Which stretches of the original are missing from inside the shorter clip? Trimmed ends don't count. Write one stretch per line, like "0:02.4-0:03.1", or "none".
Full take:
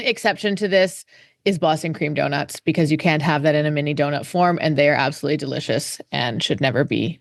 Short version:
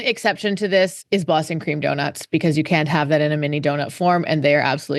0:01.0-0:01.3